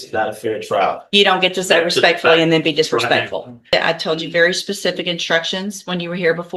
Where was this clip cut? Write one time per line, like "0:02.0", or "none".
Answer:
0:03.7

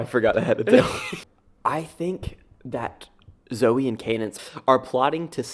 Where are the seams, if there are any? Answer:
0:01.0
0:04.4

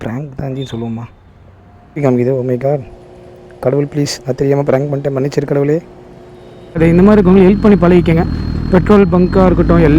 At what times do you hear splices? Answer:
0:02.0
0:06.8

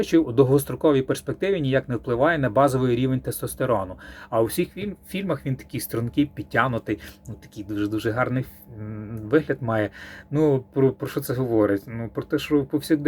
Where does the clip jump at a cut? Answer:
0:04.2

